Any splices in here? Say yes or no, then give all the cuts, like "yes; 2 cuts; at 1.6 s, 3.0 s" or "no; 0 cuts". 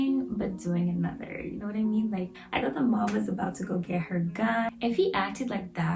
yes; 2 cuts; at 2.4 s, 4.7 s